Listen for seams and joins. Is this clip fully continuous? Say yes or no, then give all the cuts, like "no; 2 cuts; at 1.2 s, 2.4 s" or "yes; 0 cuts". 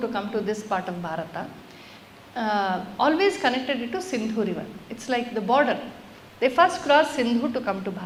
yes; 0 cuts